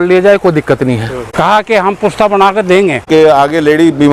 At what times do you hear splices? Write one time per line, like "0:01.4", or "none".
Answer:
0:01.2
0:03.0